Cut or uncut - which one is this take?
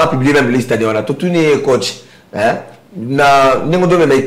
uncut